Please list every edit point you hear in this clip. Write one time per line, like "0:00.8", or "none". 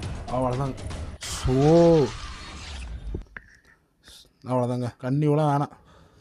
0:05.0